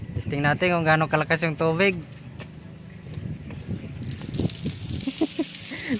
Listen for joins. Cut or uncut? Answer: cut